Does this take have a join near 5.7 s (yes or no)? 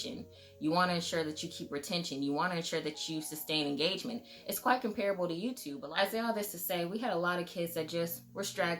yes